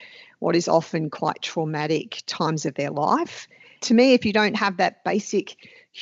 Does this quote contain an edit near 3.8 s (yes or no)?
yes